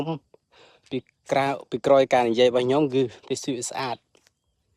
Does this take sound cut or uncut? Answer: uncut